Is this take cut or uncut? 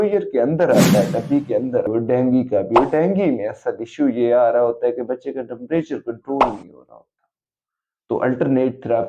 cut